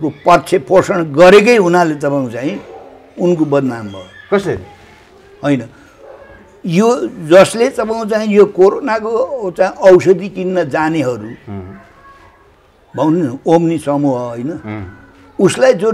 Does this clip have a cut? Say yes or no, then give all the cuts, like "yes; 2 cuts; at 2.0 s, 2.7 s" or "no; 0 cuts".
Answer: no; 0 cuts